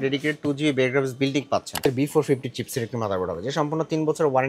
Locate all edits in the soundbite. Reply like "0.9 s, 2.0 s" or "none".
1.8 s